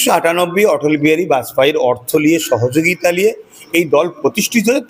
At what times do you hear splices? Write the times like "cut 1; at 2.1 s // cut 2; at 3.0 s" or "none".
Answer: none